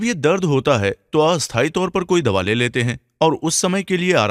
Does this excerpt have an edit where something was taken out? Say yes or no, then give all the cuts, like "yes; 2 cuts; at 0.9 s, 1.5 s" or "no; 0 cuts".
yes; 1 cut; at 1.0 s